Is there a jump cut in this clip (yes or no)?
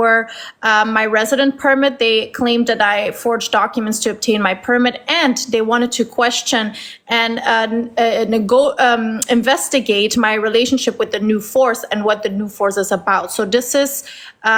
no